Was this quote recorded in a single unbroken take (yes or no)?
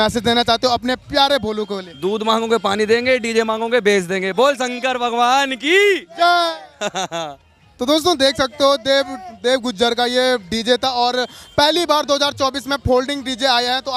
yes